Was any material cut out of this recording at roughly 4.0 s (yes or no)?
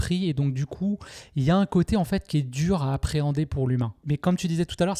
yes